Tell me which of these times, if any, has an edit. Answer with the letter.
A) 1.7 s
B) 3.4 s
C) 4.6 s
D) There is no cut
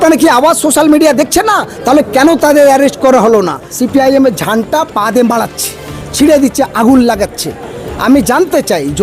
B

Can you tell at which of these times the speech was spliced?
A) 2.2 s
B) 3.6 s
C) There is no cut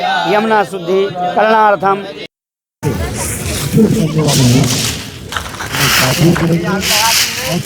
A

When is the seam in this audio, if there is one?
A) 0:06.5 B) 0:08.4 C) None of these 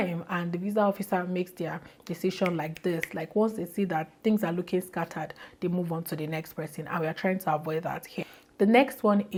C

